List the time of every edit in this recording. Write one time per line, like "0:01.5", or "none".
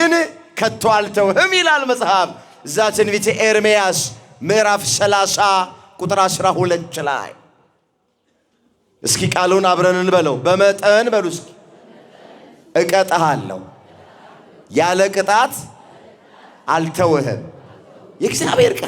none